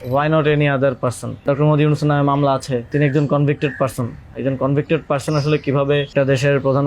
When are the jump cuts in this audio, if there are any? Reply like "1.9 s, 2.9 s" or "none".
1.4 s, 2.9 s, 6.1 s